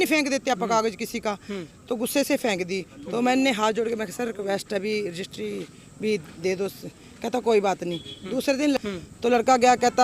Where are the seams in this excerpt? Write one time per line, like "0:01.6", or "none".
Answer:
0:08.8

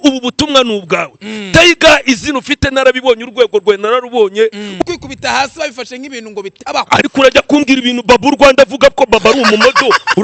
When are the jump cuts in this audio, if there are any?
0:04.8

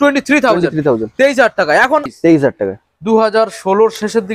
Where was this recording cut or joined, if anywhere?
0:02.1

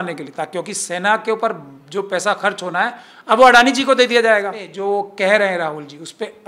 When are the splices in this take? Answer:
0:04.7

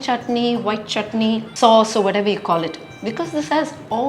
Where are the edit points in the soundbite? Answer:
0:01.5

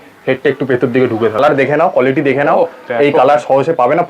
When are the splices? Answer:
0:01.4

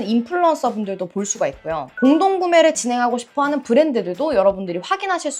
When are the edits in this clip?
none

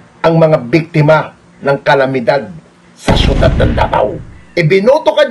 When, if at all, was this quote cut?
0:04.4

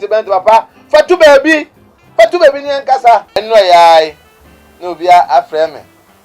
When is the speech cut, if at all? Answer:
0:03.4

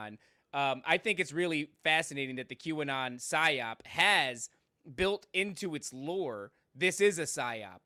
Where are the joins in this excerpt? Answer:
none

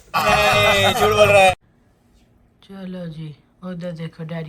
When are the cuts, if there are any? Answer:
0:01.6

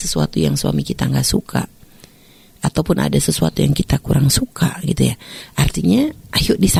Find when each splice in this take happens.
none

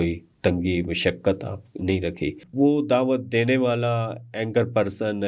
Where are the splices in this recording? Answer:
0:02.4

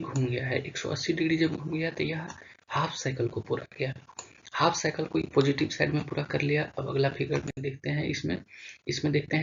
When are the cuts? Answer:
0:02.1

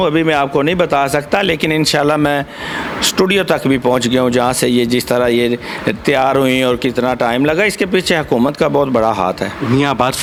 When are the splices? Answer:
none

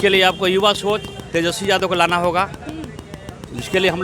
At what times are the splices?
none

